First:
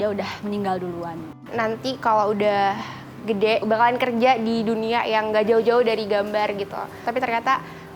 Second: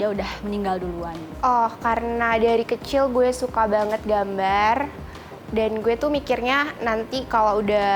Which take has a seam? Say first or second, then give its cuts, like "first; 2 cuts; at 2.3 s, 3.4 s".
first; 2 cuts; at 1.4 s, 7.1 s